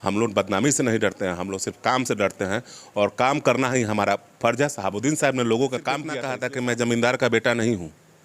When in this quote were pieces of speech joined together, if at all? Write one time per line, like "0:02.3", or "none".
0:06.3